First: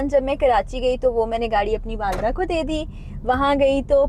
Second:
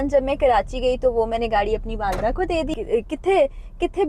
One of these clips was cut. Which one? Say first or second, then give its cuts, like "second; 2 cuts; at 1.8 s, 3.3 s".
second; 1 cut; at 2.8 s